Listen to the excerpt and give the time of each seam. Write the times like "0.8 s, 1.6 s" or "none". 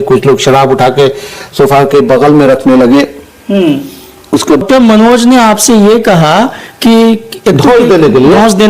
4.6 s